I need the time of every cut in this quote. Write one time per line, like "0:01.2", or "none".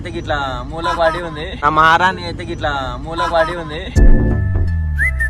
none